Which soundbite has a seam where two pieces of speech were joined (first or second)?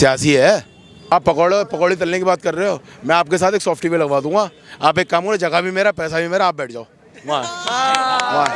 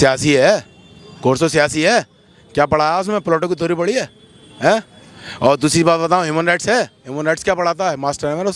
first